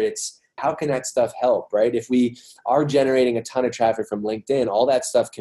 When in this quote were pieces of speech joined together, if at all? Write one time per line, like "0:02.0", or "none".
none